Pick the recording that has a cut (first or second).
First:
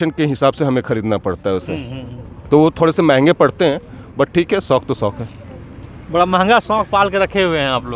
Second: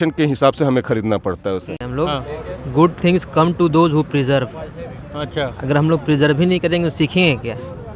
second